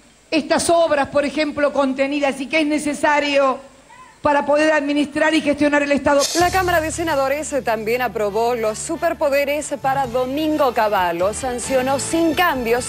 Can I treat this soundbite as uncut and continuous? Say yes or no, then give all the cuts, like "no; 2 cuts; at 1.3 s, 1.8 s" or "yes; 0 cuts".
yes; 0 cuts